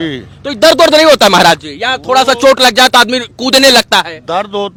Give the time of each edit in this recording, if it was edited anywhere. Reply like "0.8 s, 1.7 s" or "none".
none